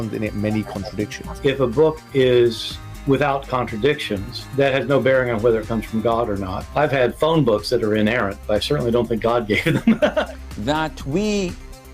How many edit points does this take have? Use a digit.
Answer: 1